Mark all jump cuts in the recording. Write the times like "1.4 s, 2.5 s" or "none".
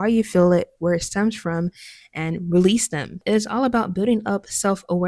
3.2 s